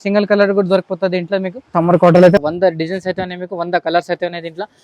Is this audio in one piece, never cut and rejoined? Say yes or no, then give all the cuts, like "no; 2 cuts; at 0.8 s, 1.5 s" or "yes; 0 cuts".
no; 2 cuts; at 1.6 s, 2.4 s